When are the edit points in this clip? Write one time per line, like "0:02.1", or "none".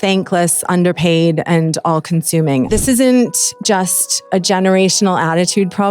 0:02.7